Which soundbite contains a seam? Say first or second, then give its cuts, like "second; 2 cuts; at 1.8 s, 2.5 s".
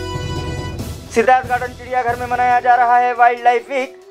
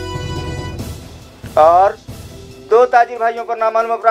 first; 1 cut; at 1.0 s